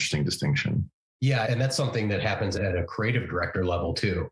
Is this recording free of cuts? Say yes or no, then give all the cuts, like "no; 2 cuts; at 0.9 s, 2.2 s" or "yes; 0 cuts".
no; 2 cuts; at 1.5 s, 2.6 s